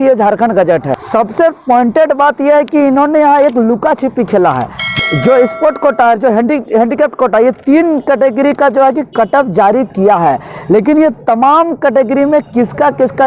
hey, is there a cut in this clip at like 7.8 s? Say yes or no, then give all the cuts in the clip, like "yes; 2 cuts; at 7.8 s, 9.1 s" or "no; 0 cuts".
no; 2 cuts; at 1.0 s, 4.9 s